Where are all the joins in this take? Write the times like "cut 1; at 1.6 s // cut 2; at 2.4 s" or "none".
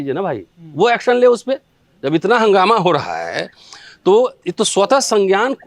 none